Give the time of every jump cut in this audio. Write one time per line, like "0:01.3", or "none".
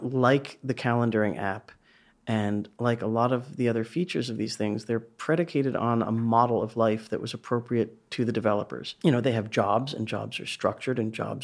0:08.8